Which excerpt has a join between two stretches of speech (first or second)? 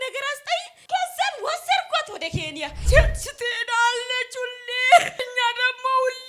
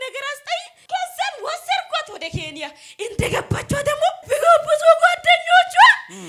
first